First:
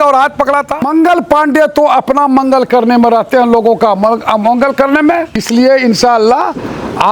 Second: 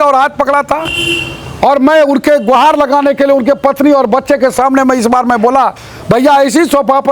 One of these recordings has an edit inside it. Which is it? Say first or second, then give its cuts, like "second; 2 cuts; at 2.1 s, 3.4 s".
first; 2 cuts; at 0.9 s, 5.4 s